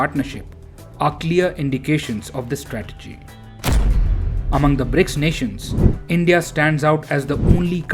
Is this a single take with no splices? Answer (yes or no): yes